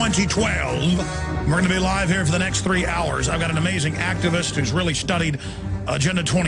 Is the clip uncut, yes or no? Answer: no